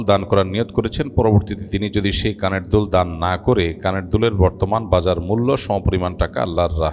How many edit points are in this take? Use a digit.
0